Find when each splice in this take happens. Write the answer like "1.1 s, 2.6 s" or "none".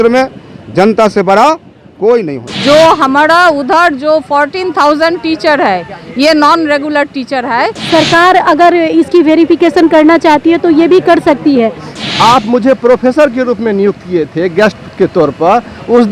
2.5 s, 7.8 s, 11.9 s